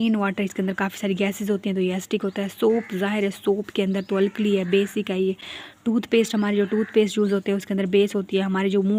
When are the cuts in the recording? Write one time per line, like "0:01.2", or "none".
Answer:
none